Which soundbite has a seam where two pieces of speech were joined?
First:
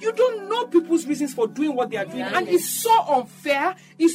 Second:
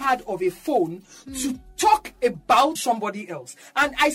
second; 1 cut; at 2.8 s

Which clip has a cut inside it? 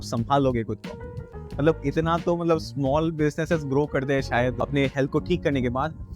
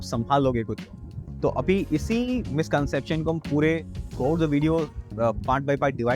first; 2 cuts; at 1.2 s, 4.6 s

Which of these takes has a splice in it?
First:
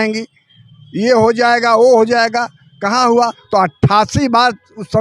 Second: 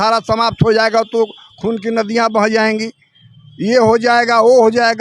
first; 1 cut; at 3.4 s

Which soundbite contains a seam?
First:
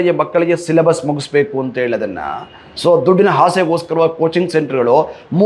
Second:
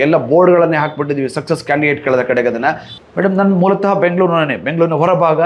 second; 1 cut; at 2.9 s

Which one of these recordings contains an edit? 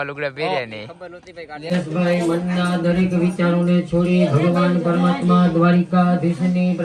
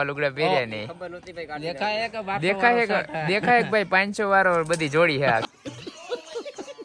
first; 1 cut; at 1.7 s

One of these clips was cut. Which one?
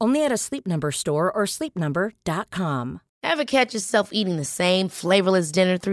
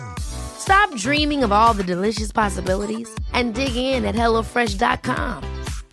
first; 1 cut; at 3.1 s

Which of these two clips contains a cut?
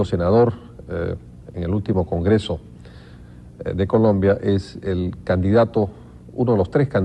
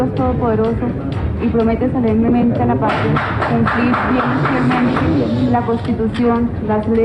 first; 1 cut; at 1.2 s

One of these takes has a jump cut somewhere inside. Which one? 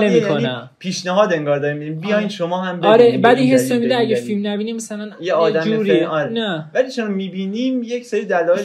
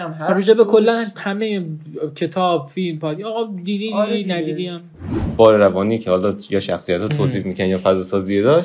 second; 1 cut; at 5.2 s

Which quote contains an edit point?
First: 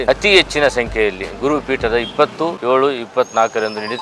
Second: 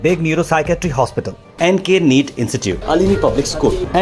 first; 1 cut; at 2.6 s

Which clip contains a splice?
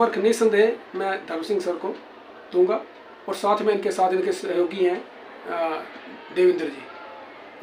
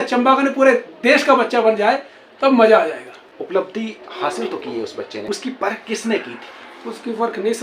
second; 2 cuts; at 3.2 s, 5.2 s

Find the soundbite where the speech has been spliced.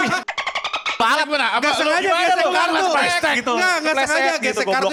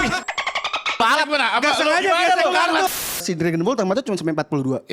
second; 1 cut; at 3.2 s

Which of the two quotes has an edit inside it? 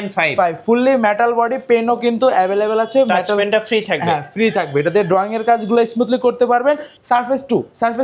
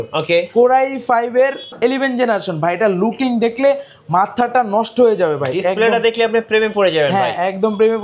first; 1 cut; at 6.9 s

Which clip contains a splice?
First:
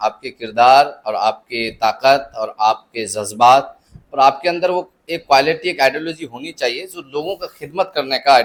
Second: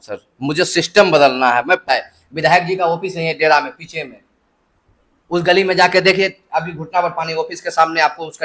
second; 1 cut; at 1.8 s

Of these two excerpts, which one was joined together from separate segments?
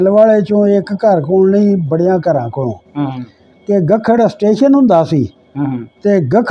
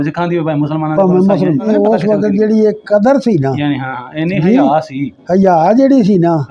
second; 1 cut; at 1.7 s

